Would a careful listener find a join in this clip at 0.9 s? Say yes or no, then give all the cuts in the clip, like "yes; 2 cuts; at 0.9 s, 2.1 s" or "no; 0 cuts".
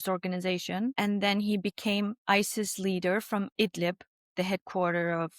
yes; 1 cut; at 0.9 s